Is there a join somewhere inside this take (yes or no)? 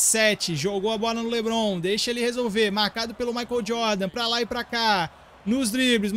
no